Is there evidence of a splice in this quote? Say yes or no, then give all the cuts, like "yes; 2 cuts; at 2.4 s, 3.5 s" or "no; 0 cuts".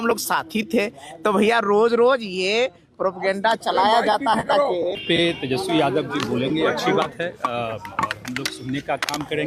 yes; 1 cut; at 5.0 s